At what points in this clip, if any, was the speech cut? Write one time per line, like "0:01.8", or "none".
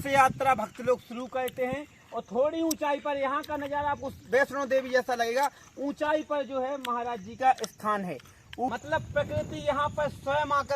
0:08.7